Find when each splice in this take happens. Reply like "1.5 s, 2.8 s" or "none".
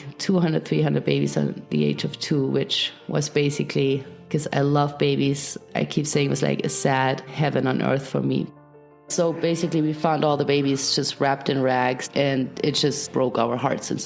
9.0 s

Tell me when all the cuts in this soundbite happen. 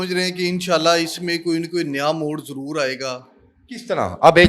none

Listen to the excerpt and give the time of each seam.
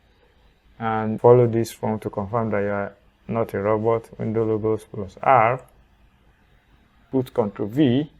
1.2 s, 6.9 s

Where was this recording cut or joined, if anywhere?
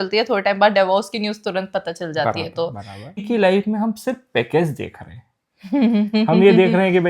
3.2 s

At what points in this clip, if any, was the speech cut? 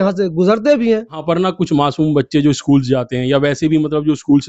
1.2 s

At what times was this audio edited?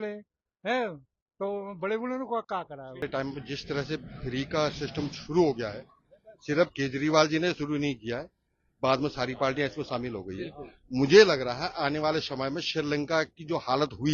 3.1 s

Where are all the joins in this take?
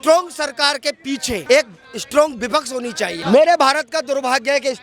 1.4 s, 3.2 s

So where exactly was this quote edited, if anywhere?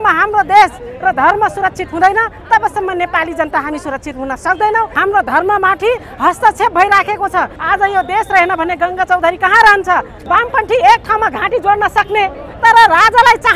4.9 s, 7.6 s, 10.1 s

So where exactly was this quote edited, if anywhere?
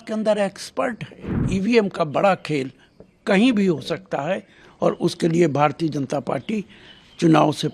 1.4 s

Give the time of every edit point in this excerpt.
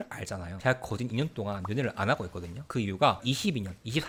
none

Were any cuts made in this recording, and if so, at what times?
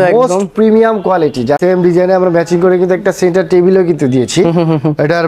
1.6 s

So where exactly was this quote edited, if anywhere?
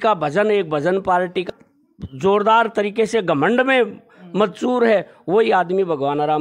1.5 s

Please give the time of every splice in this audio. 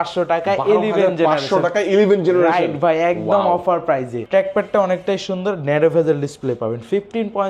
4.2 s

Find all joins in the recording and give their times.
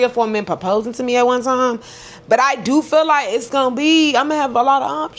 none

